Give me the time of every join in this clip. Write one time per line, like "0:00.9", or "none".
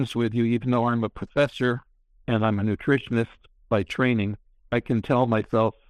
none